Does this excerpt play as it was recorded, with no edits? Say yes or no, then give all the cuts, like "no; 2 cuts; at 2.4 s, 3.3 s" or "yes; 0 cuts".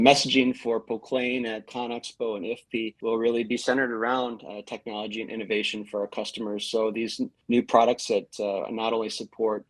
no; 1 cut; at 3.0 s